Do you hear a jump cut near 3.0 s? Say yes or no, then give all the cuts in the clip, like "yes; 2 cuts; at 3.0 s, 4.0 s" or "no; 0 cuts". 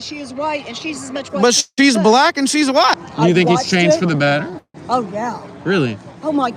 yes; 1 cut; at 3.0 s